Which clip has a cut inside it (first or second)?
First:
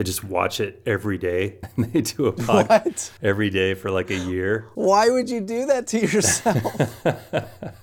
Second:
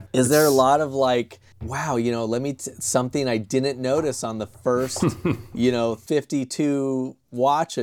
first